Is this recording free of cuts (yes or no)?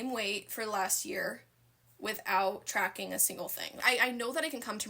no